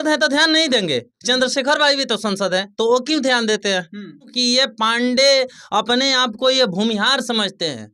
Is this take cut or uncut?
cut